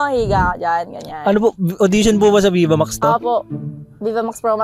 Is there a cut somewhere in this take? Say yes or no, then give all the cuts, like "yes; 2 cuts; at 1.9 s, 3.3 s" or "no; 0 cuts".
no; 0 cuts